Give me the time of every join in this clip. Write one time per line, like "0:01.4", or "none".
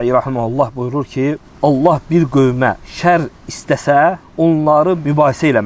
0:01.5
0:02.9
0:04.7